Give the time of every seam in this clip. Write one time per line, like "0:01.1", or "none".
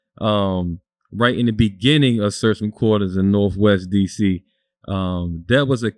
none